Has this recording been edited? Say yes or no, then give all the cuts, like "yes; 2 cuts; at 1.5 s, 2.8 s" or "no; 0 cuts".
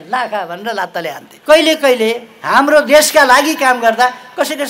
yes; 1 cut; at 1.3 s